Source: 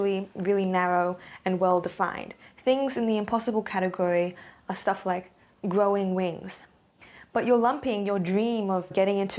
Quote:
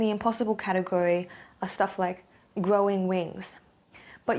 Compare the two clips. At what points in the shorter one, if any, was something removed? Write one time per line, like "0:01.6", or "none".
none